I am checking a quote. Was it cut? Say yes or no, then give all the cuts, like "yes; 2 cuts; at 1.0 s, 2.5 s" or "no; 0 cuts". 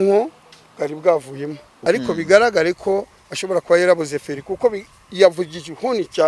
yes; 1 cut; at 1.6 s